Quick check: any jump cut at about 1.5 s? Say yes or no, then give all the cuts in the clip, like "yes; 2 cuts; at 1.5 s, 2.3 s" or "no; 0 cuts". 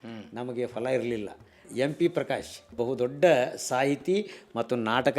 yes; 2 cuts; at 1.5 s, 2.8 s